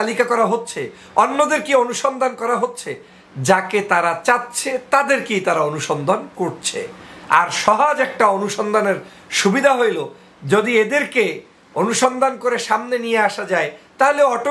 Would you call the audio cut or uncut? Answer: uncut